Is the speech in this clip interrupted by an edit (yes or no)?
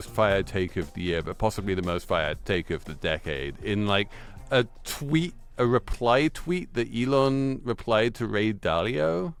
no